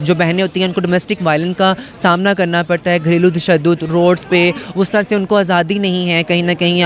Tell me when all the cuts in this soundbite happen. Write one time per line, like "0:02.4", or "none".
none